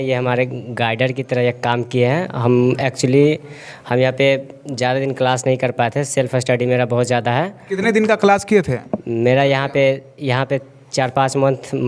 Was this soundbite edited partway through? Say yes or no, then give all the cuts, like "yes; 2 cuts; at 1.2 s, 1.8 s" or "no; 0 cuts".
no; 0 cuts